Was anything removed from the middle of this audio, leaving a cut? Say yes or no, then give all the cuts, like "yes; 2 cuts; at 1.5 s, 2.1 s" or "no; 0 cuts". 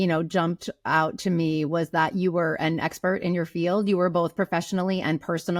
no; 0 cuts